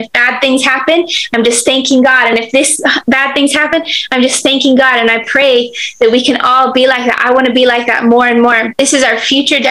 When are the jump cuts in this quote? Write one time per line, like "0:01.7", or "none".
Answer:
0:08.7